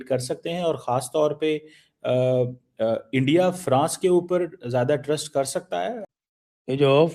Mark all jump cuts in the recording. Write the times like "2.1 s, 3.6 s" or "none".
6.0 s